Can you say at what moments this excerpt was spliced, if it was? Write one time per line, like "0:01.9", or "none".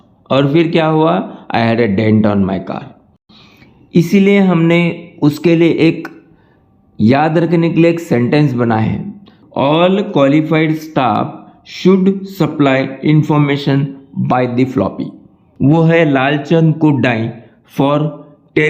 0:03.2
0:09.4
0:15.4